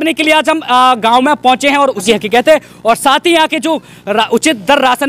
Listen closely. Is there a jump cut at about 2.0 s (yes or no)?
yes